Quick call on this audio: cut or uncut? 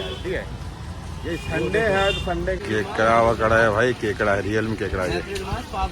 cut